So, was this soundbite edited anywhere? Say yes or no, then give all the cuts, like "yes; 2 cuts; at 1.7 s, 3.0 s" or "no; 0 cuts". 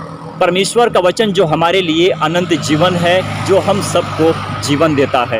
no; 0 cuts